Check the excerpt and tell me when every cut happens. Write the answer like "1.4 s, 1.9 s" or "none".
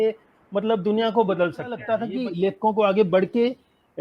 1.9 s